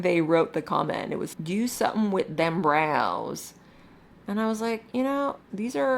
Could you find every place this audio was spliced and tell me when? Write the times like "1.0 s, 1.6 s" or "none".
1.3 s